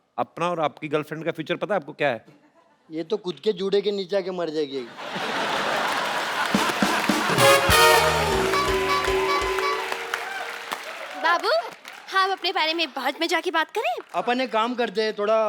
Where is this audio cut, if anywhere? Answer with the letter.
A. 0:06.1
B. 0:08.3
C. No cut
C